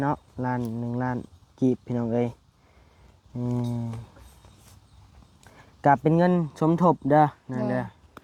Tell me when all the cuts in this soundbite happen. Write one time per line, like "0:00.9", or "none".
none